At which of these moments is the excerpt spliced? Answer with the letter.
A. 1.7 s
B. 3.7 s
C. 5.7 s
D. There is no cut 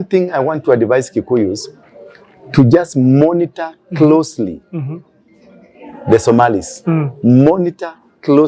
D